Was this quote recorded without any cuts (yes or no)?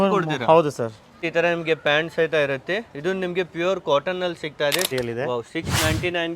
no